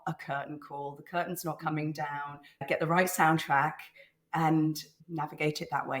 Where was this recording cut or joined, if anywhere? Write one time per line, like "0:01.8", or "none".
0:02.7
0:04.9